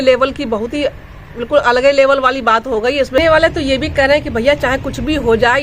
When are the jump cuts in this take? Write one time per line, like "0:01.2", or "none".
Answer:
0:03.2